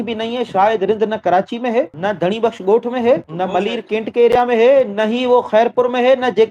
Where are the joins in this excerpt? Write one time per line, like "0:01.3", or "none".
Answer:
none

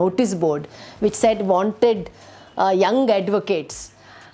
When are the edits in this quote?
none

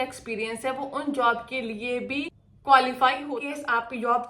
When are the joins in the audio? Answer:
0:02.4
0:03.2

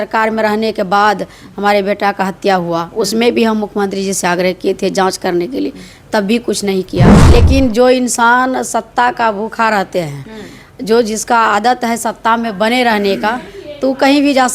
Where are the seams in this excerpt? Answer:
0:07.1

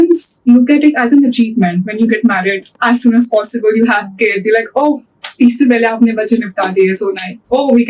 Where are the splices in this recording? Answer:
none

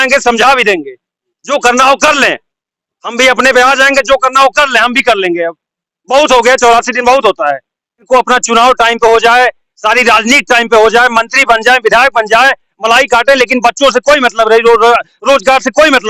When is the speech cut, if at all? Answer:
0:08.1

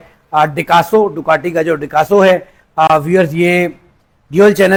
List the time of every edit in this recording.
none

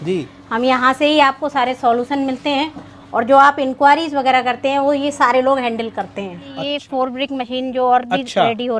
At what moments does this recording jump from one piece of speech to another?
0:06.6

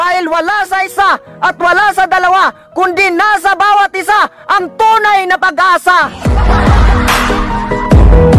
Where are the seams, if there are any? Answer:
0:06.1

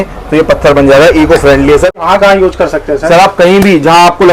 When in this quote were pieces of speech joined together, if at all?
0:02.0

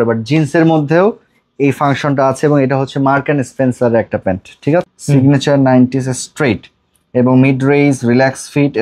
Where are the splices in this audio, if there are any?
0:04.8

